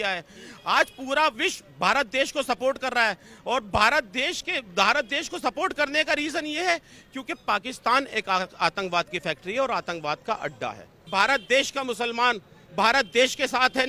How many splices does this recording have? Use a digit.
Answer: 1